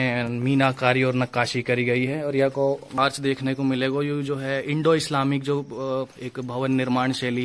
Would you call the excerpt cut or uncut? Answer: cut